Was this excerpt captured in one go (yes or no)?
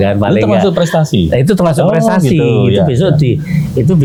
yes